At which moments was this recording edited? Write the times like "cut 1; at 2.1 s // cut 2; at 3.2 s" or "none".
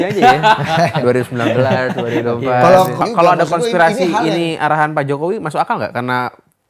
cut 1; at 2.9 s